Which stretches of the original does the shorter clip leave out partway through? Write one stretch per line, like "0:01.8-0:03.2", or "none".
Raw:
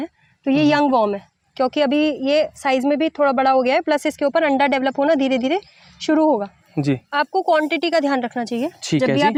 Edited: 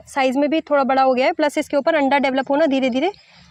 none